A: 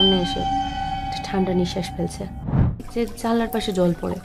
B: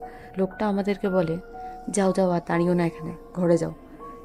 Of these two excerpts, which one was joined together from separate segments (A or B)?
A